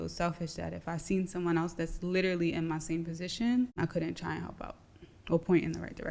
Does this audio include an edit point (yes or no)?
yes